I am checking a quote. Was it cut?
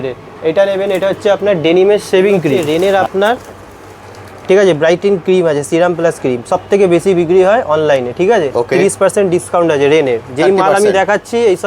yes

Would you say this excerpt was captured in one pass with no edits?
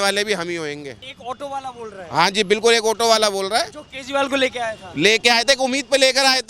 no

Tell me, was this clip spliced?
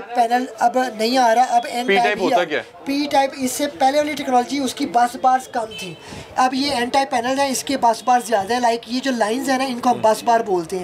no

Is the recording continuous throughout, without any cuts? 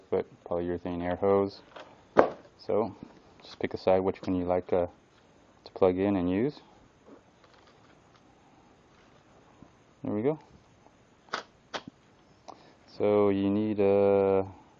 yes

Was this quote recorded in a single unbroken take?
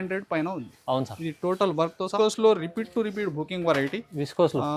no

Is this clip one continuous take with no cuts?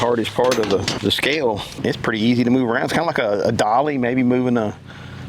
no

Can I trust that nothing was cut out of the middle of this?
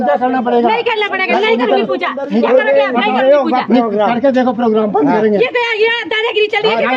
yes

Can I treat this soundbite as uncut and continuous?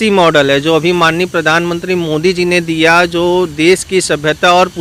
yes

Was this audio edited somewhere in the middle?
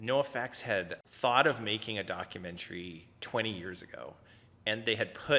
yes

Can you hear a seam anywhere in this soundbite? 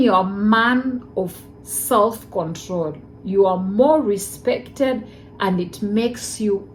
no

